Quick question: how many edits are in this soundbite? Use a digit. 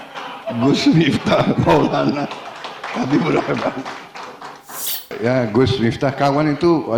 1